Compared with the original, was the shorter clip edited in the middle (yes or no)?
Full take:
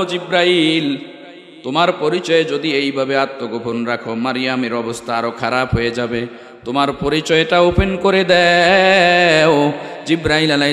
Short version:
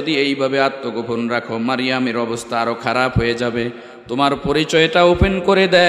no